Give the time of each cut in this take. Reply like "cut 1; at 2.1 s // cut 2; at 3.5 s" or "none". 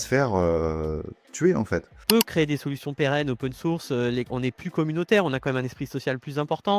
cut 1; at 1.9 s